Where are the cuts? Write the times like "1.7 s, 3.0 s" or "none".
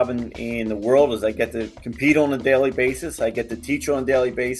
none